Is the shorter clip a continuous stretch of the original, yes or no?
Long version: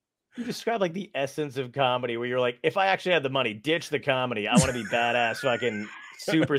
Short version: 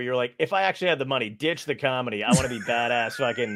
yes